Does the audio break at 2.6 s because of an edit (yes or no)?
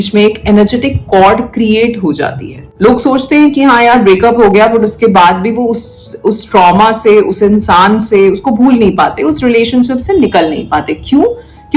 yes